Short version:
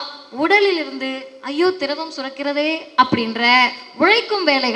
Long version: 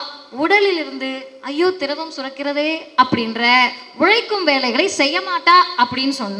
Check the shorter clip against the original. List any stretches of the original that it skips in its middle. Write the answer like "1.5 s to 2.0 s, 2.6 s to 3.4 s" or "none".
none

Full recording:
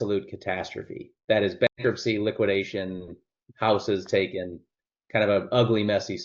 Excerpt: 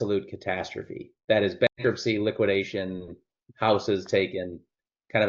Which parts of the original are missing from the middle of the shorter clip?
none

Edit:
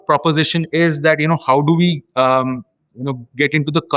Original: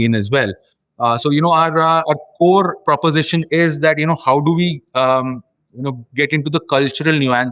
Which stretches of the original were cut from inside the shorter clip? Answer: none

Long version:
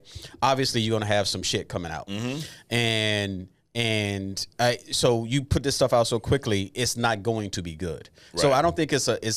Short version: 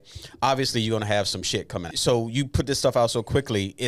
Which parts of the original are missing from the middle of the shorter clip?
1.9 s to 4.9 s

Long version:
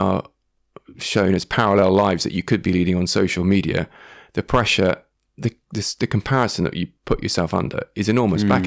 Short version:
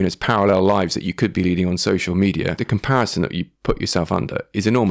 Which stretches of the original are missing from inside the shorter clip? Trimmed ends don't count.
3.9 s to 6.0 s

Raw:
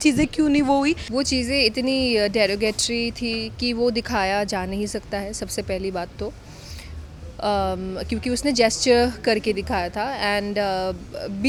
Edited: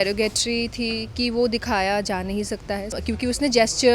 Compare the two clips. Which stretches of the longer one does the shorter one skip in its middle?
5.4 s to 8.0 s

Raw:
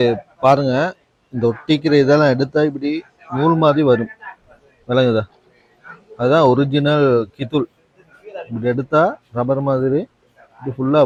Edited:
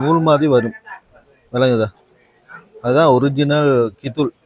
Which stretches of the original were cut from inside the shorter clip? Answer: none

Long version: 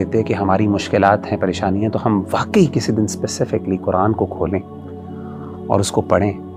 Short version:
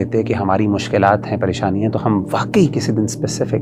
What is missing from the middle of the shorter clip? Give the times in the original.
none

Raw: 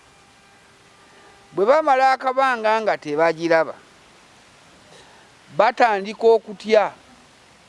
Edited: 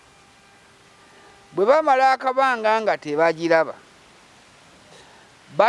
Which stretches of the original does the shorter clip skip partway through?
none

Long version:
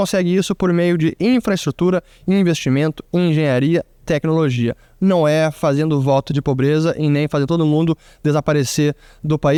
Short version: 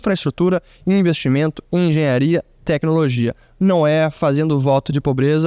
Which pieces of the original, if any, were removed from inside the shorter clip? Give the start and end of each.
none

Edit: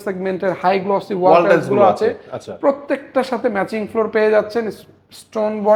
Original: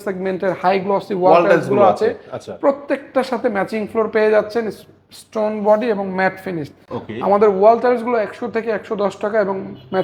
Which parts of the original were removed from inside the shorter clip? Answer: none

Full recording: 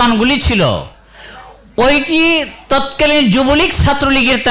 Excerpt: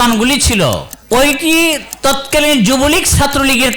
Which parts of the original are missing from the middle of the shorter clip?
0.9 s to 1.6 s

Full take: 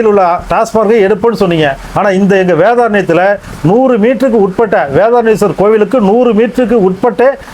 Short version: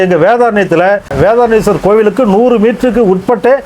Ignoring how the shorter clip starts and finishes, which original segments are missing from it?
3.5 s to 4.9 s

